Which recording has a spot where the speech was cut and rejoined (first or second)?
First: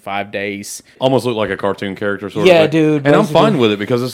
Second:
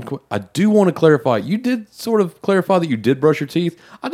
first